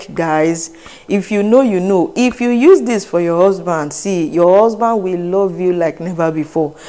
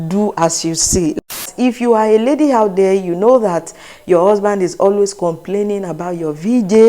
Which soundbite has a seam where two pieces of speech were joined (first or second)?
second